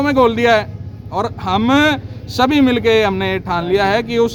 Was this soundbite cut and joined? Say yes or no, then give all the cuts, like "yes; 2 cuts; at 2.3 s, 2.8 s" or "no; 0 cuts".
no; 0 cuts